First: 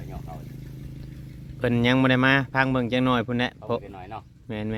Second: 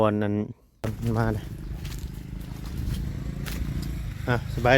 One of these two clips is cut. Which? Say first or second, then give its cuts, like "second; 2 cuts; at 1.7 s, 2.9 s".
second; 1 cut; at 0.9 s